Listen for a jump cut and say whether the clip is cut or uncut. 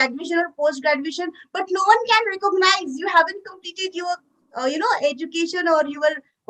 uncut